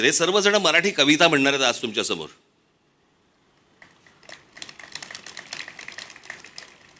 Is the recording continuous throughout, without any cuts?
yes; 0 cuts

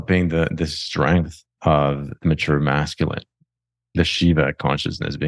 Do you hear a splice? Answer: yes; 1 cut; at 3.8 s

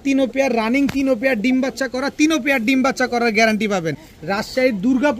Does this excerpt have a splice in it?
yes; 1 cut; at 4.1 s

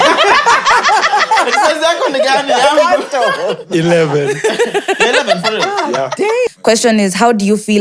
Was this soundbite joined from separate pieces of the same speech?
yes; 1 cut; at 6.5 s

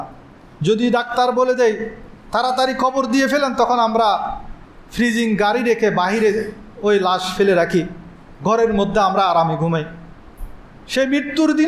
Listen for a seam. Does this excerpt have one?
no; 0 cuts

